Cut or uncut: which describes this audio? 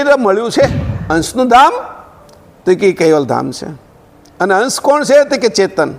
cut